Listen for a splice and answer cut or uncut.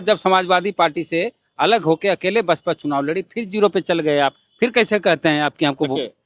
uncut